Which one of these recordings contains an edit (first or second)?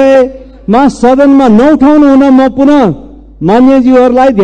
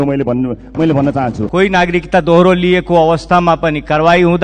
second